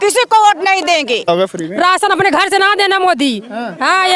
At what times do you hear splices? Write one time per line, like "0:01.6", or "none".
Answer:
0:01.3